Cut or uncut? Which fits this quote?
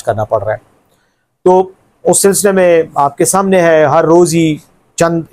uncut